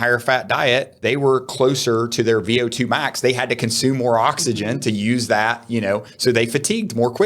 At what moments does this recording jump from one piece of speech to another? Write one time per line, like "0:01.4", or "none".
0:00.9